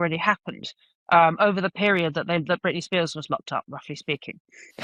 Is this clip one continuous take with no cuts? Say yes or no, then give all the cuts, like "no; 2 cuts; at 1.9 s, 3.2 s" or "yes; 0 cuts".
yes; 0 cuts